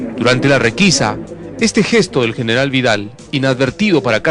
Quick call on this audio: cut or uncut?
uncut